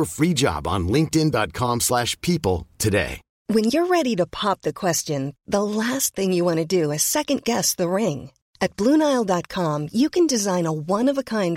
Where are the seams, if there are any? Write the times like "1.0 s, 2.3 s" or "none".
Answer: 3.2 s